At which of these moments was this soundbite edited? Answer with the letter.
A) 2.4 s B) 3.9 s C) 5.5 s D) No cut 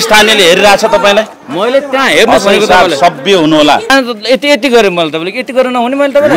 B